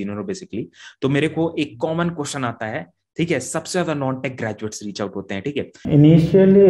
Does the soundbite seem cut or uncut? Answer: cut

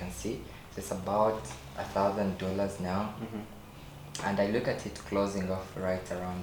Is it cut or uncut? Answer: uncut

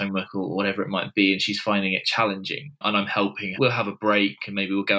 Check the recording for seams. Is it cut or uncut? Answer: uncut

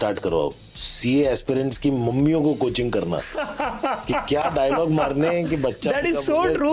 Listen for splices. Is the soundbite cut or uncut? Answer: uncut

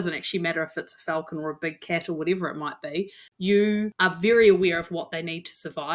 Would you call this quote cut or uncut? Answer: cut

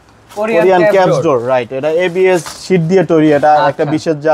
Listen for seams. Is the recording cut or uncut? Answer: uncut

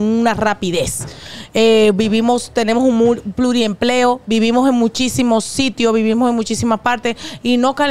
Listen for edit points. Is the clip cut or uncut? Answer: uncut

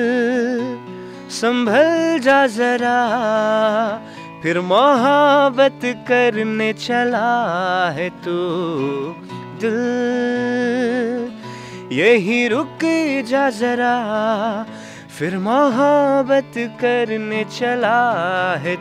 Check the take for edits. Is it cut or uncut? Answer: uncut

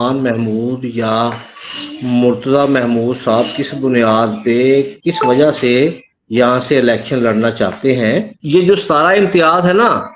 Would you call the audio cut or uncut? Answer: cut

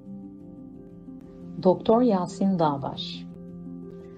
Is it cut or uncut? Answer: cut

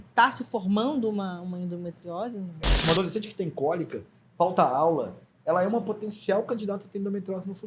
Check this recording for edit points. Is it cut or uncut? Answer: cut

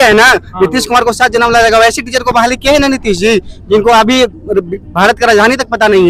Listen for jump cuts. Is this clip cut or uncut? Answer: uncut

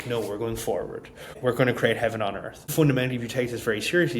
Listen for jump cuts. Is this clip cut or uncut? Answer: cut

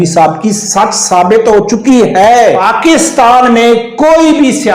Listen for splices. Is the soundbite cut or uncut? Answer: cut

